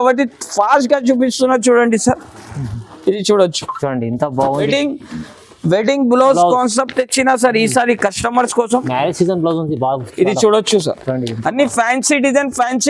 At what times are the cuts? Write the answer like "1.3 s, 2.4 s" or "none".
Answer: 4.7 s